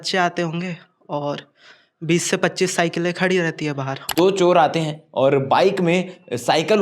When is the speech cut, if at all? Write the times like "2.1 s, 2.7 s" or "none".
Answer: 4.0 s